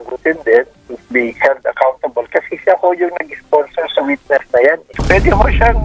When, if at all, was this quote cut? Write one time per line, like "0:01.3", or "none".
0:04.9